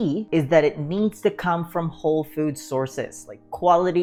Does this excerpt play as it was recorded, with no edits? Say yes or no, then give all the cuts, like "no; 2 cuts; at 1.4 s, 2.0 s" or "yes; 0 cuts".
yes; 0 cuts